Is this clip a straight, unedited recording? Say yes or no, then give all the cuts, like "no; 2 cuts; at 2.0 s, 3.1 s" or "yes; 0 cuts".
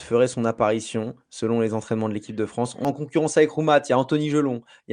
no; 1 cut; at 2.7 s